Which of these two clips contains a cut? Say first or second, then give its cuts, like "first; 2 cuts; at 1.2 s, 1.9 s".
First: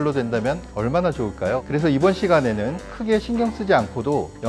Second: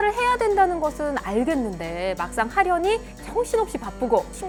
first; 1 cut; at 1.6 s